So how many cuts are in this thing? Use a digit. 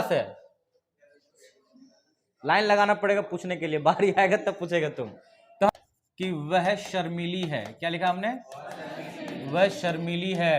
1